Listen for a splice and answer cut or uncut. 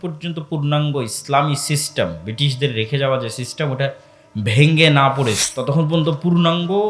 cut